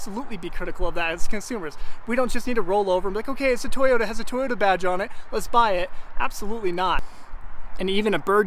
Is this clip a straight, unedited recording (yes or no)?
no